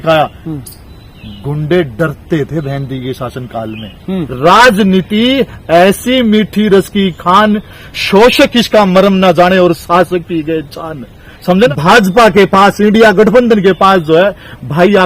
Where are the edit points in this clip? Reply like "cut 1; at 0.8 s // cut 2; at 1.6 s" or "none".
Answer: cut 1; at 4.2 s // cut 2; at 11.5 s